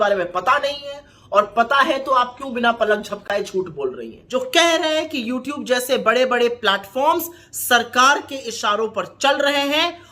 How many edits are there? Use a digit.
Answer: 1